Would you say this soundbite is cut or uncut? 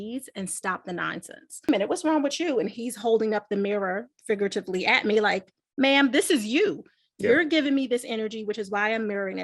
cut